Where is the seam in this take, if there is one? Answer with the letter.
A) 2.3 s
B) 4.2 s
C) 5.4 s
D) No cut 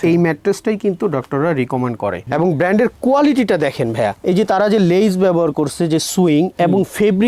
A